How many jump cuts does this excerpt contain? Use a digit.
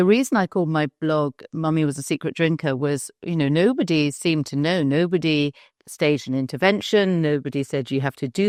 0